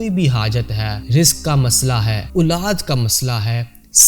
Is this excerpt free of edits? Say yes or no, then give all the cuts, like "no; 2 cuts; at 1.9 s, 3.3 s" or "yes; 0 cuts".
no; 2 cuts; at 0.9 s, 2.2 s